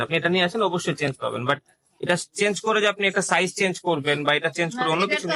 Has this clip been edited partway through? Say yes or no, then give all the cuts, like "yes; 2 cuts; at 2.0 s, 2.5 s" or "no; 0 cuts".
no; 0 cuts